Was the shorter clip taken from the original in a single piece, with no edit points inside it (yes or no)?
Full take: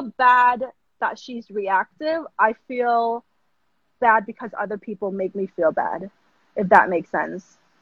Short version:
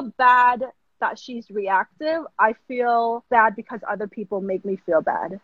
no